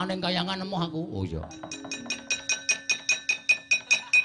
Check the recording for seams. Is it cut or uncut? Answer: cut